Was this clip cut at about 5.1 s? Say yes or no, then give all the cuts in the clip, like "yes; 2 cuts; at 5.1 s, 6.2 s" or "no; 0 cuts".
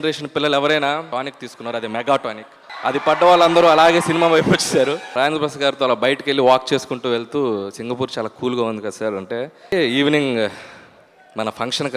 yes; 3 cuts; at 1.1 s, 5.1 s, 9.7 s